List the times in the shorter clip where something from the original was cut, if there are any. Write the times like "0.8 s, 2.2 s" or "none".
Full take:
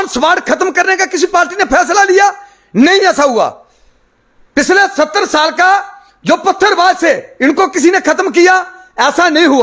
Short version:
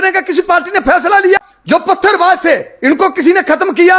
1.4 s